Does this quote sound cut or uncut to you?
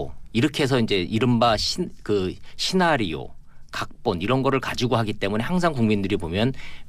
uncut